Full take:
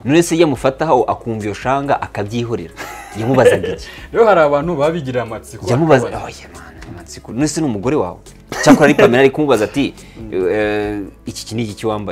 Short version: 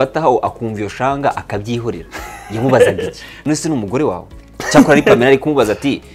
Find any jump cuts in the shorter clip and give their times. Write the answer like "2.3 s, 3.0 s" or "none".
3.2 s